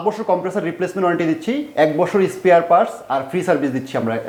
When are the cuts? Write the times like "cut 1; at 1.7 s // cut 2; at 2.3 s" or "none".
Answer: none